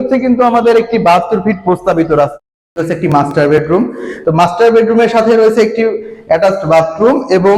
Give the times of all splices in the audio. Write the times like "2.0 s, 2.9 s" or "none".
2.3 s